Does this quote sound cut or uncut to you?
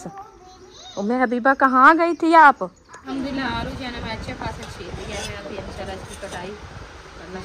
cut